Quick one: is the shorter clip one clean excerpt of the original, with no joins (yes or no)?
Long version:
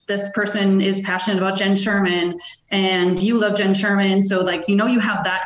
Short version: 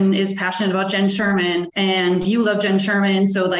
no